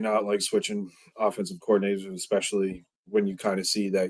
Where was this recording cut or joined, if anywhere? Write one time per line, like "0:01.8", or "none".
none